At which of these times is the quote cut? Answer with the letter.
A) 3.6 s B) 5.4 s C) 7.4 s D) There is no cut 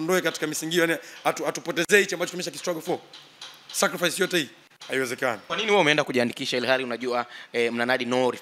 B